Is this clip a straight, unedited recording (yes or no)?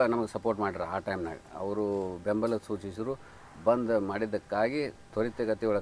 yes